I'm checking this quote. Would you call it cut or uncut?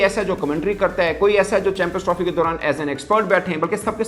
uncut